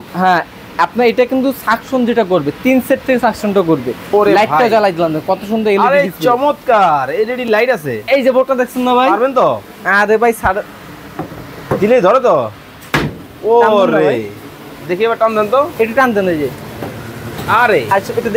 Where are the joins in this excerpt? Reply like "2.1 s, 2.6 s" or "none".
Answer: 4.0 s